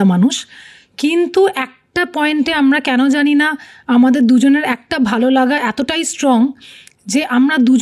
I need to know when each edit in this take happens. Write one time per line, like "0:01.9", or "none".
none

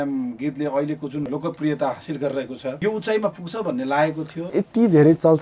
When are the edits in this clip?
0:01.3
0:02.8
0:04.6

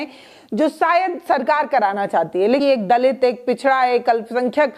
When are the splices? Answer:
0:02.6

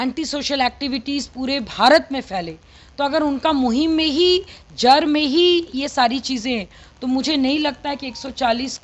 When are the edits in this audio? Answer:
none

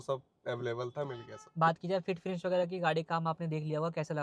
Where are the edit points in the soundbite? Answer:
none

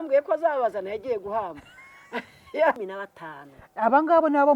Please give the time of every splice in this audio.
0:02.8

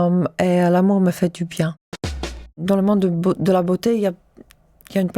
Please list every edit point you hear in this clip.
0:02.4

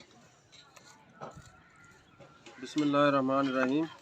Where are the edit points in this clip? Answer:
0:00.7
0:02.4

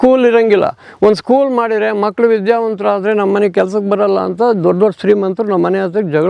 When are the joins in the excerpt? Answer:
none

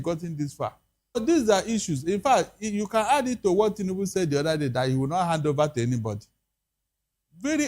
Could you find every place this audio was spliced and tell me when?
0:01.2

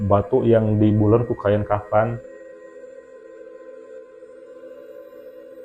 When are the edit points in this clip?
none

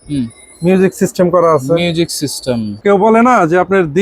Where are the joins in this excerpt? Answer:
0:02.7

